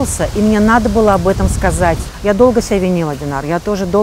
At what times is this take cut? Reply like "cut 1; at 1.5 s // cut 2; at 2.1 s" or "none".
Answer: cut 1; at 2.1 s